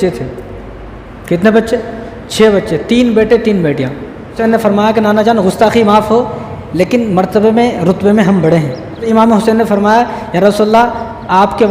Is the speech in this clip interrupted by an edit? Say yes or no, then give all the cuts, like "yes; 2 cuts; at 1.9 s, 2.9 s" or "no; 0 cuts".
yes; 2 cuts; at 4.4 s, 9.0 s